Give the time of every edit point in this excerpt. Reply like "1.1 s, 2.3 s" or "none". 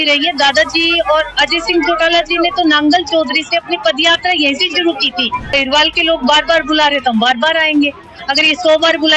5.6 s